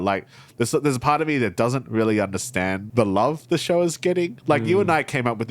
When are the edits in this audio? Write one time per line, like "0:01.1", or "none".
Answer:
0:02.8